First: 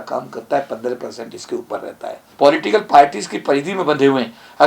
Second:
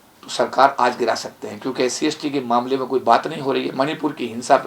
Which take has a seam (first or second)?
first